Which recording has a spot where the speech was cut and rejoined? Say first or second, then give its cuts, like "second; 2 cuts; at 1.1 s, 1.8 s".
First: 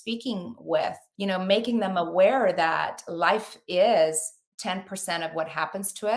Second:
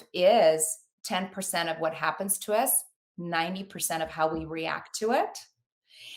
first; 1 cut; at 1.1 s